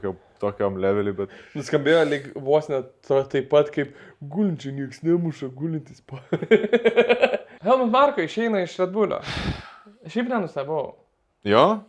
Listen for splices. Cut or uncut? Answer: cut